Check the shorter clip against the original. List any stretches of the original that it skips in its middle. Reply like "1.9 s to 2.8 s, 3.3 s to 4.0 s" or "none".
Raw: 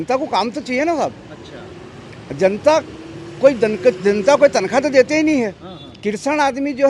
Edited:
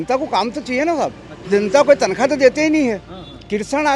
1.5 s to 4.0 s